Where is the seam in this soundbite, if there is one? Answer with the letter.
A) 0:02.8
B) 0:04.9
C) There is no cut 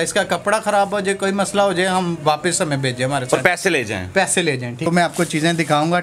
B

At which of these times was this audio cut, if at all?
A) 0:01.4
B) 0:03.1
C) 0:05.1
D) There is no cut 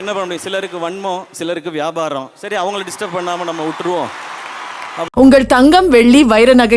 C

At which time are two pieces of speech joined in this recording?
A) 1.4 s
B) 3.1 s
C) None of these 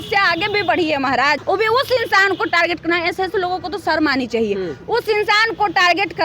A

